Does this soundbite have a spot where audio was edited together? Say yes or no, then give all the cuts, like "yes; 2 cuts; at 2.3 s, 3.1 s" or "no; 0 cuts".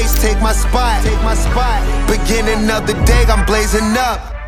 no; 0 cuts